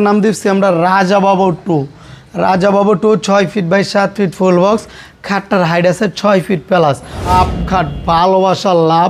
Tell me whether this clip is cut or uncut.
cut